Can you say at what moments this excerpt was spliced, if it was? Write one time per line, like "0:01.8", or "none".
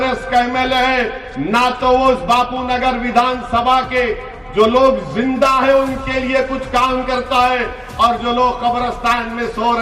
none